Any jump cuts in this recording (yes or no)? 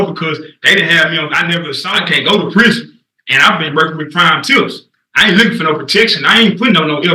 yes